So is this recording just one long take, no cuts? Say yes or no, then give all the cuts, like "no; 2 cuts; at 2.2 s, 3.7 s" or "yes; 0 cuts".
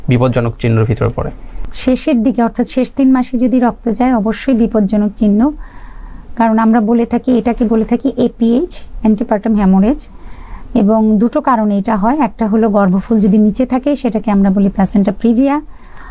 yes; 0 cuts